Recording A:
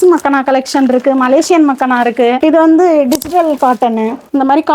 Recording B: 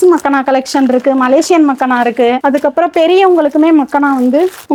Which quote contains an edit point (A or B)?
A